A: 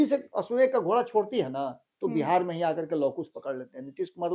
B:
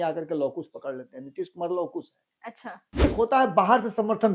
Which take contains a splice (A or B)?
B